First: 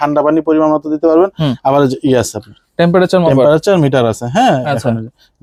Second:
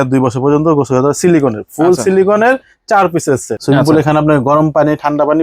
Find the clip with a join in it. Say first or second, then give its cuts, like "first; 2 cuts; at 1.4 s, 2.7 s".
second; 1 cut; at 3.5 s